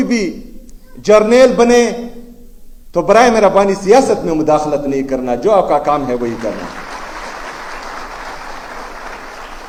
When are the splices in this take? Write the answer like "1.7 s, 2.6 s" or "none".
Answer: none